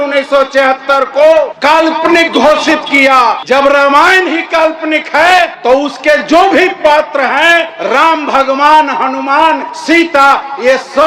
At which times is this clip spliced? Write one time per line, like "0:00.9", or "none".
0:01.7
0:03.4
0:05.5
0:07.3
0:09.7